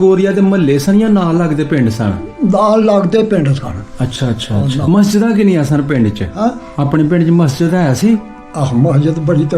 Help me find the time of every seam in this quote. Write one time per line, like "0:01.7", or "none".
0:04.8